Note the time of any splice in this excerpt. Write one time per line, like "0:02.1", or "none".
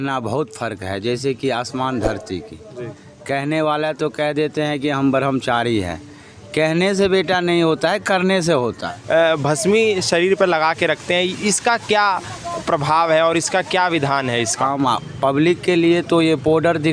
0:08.9
0:14.6